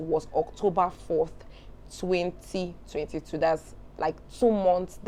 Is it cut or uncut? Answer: uncut